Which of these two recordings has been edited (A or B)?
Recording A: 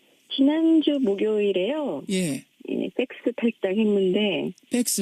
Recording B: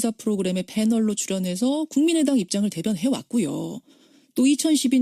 B